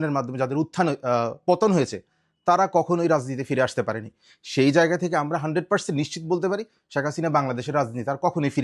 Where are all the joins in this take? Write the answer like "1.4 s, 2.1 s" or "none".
none